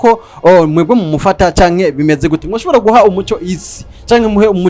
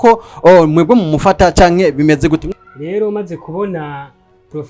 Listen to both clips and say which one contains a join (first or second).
second